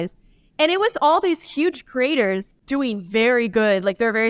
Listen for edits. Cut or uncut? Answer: cut